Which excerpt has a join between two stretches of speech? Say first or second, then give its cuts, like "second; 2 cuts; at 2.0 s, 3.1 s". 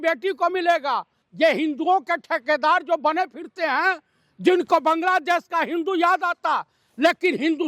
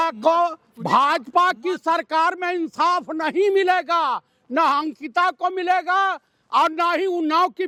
first; 1 cut; at 1.2 s